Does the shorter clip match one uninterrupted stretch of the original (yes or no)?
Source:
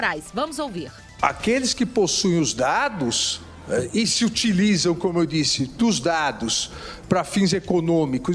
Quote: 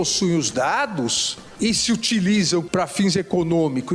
no